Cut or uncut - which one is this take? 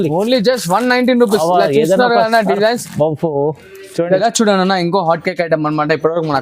cut